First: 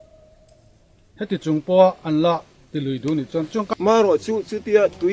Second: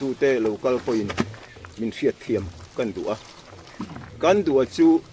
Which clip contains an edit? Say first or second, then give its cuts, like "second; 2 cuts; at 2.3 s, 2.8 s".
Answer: first; 1 cut; at 3.7 s